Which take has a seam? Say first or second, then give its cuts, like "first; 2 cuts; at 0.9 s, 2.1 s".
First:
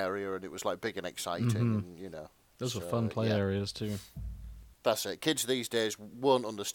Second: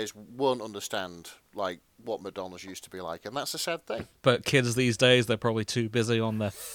second; 2 cuts; at 1.9 s, 4.1 s